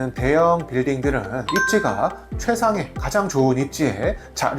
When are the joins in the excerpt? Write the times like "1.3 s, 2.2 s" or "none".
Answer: 1.4 s